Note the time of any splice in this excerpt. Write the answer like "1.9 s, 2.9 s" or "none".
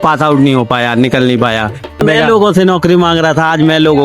2.0 s